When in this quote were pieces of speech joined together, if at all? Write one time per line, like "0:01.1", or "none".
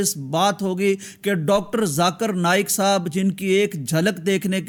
none